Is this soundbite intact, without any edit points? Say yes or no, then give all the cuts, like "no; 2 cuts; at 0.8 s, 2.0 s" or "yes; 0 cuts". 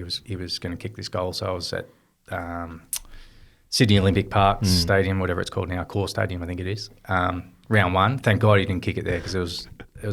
yes; 0 cuts